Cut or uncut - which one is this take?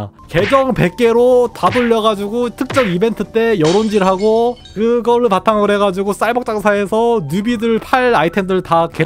uncut